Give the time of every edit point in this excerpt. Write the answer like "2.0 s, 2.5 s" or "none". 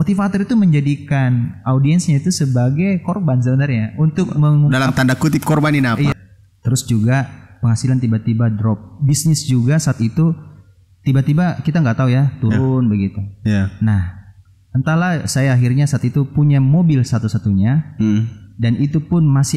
6.1 s

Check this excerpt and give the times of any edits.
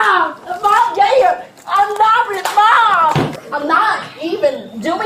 3.4 s

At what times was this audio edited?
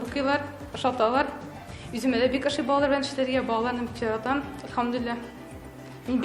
none

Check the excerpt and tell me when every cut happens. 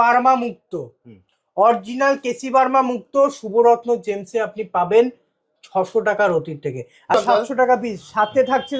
7.1 s

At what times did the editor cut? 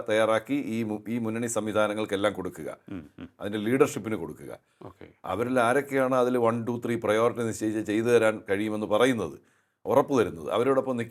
none

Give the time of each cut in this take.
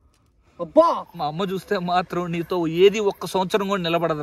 1.2 s

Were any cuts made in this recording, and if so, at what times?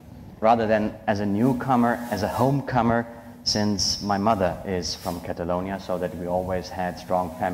6.1 s

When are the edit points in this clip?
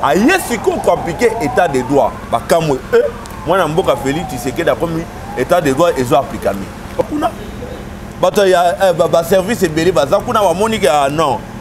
7.0 s

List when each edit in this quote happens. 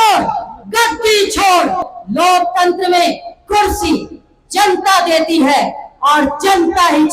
1.9 s

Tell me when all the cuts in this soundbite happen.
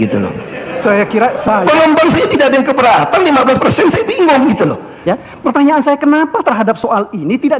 4.9 s

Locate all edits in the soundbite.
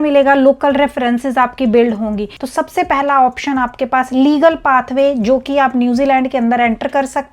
2.3 s

